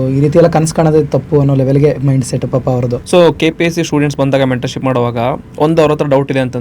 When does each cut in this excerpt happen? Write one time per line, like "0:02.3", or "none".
0:03.0